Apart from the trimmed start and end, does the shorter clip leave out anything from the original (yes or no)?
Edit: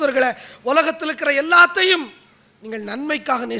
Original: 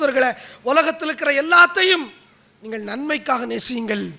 no